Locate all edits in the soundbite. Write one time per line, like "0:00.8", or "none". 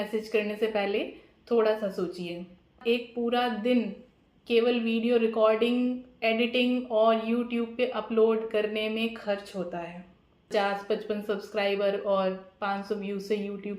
0:02.8
0:10.5